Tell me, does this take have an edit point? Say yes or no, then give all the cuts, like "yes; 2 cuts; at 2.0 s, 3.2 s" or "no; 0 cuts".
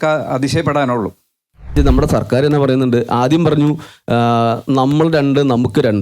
yes; 1 cut; at 1.7 s